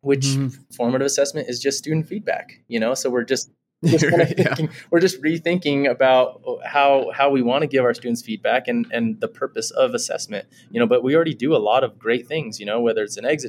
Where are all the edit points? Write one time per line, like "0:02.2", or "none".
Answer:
none